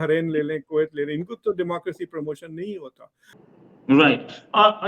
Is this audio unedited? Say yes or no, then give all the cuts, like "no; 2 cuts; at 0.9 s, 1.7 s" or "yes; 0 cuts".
no; 1 cut; at 3.3 s